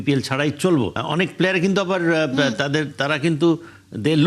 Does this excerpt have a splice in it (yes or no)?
yes